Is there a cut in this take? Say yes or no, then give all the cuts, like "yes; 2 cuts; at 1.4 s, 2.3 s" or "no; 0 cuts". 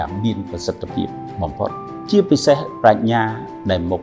yes; 1 cut; at 2.0 s